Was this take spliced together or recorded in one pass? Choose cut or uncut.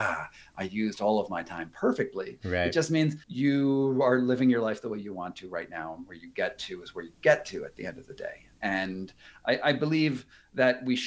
cut